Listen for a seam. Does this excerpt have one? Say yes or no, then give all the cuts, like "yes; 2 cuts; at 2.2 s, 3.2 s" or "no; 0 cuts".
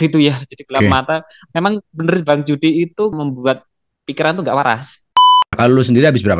yes; 2 cuts; at 3.1 s, 5.4 s